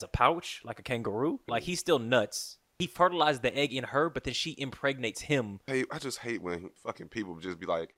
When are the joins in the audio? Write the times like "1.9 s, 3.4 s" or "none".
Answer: 1.5 s, 2.8 s, 5.6 s, 6.7 s